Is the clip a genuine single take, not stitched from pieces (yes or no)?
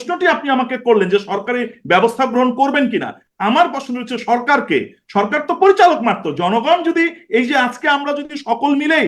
yes